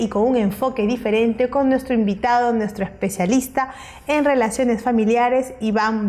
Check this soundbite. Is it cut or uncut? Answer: cut